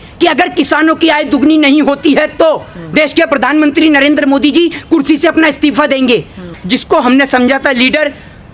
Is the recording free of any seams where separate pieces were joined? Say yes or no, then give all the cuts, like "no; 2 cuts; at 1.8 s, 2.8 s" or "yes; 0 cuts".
no; 1 cut; at 6.5 s